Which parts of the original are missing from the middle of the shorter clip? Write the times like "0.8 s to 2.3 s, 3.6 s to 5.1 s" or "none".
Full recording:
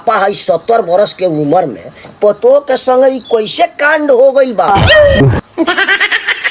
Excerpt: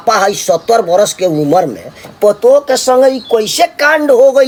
none